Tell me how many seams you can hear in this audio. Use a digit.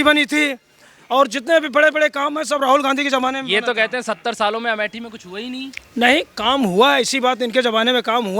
0